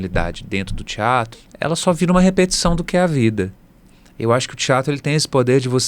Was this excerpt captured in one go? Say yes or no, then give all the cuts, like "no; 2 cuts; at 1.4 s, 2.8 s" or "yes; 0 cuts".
no; 1 cut; at 1.4 s